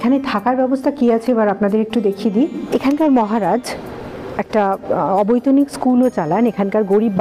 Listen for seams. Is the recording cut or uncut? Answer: cut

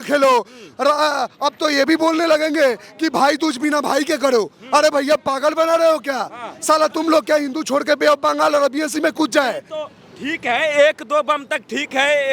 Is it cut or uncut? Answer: uncut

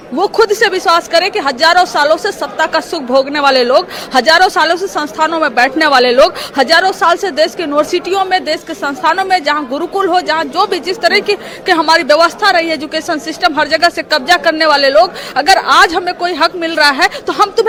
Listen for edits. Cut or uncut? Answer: uncut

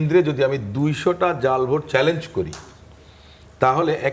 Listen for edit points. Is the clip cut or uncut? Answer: uncut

